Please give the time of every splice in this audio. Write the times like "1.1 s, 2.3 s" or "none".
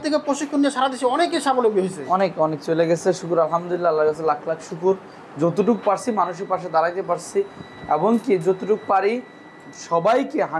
none